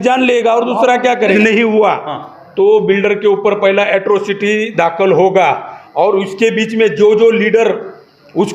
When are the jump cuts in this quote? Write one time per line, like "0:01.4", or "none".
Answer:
0:01.3